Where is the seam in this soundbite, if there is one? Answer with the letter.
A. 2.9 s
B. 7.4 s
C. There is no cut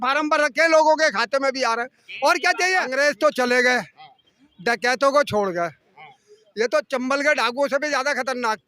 A